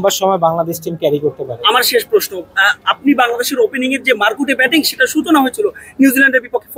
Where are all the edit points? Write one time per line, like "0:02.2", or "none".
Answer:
none

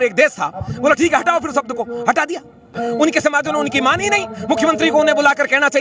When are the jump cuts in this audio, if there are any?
0:02.8

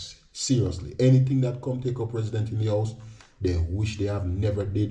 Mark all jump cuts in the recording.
none

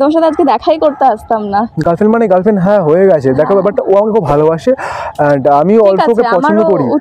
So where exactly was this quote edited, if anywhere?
none

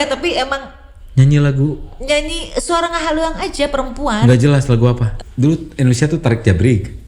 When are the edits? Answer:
0:05.1

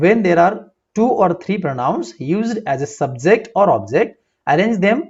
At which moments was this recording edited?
none

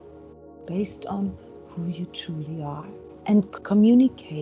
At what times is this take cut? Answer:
0:03.5

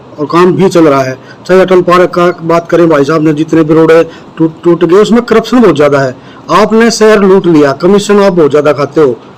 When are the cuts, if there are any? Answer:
none

